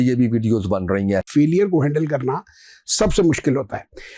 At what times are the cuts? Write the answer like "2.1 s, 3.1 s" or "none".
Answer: 1.3 s